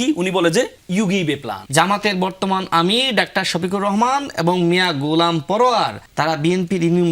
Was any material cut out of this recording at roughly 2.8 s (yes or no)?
no